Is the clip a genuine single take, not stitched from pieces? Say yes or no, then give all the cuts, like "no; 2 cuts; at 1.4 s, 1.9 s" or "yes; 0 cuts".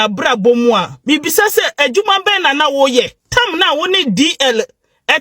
no; 1 cut; at 3.2 s